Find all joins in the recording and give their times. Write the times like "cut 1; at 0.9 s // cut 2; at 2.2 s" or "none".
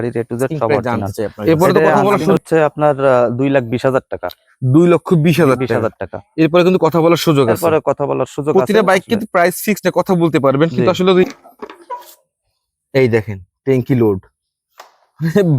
cut 1; at 2.3 s // cut 2; at 11.3 s